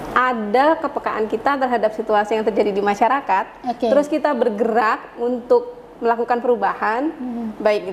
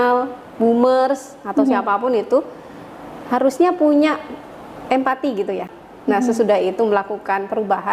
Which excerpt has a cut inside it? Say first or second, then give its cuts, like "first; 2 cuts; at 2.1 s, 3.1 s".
second; 1 cut; at 5.8 s